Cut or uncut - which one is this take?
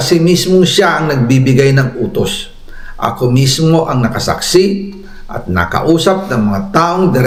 uncut